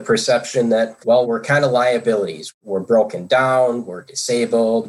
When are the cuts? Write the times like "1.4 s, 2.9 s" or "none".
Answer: 1.2 s, 2.5 s